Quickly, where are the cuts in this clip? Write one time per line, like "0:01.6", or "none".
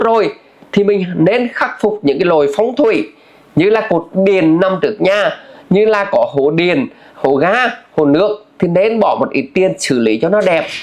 none